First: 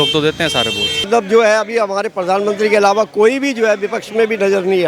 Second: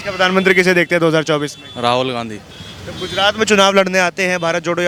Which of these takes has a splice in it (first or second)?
first